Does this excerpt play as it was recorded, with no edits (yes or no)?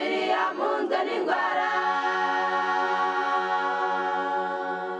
yes